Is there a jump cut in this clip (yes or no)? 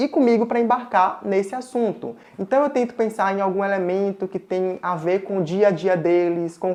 no